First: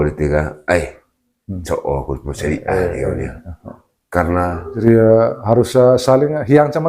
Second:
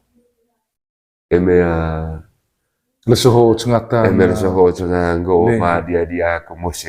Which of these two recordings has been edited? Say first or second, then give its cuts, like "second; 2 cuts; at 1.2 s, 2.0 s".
first; 1 cut; at 4.7 s